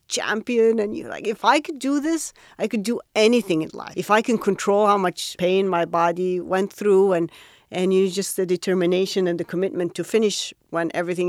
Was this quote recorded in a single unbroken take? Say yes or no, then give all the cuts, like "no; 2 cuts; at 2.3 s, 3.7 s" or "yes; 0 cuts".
no; 2 cuts; at 3.9 s, 5.2 s